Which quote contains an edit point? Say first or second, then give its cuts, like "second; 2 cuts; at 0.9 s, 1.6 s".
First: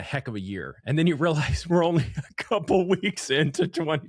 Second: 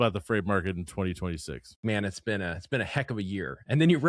second; 1 cut; at 1.8 s